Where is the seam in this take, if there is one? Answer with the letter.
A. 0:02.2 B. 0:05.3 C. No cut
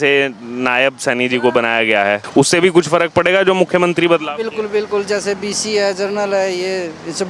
A